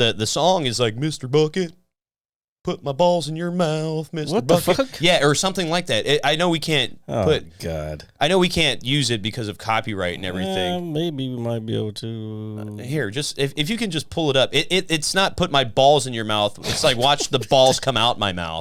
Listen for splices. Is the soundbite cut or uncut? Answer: uncut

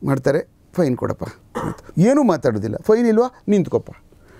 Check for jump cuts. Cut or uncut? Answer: uncut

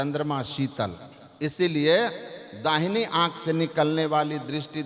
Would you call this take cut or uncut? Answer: uncut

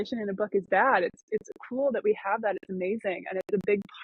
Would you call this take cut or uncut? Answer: uncut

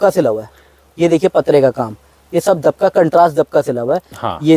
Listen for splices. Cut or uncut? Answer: uncut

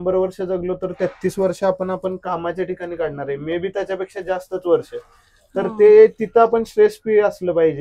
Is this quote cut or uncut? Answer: uncut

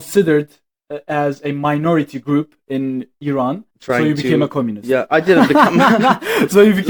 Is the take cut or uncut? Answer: cut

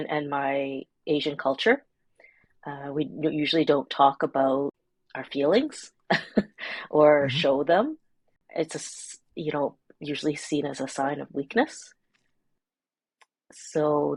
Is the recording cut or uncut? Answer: uncut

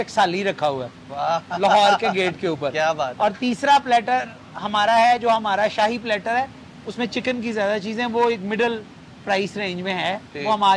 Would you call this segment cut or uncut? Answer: uncut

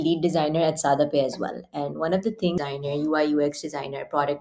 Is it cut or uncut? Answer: cut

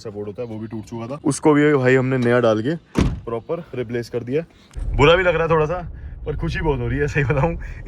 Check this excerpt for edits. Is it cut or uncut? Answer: cut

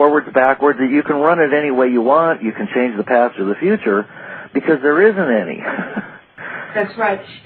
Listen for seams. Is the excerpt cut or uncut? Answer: cut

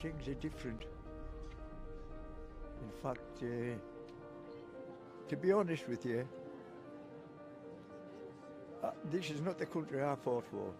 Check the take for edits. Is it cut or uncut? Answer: uncut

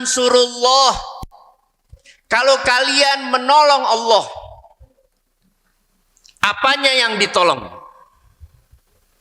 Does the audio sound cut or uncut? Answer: uncut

